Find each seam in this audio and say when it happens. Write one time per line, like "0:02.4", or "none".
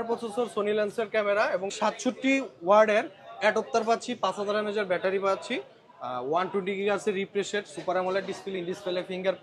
none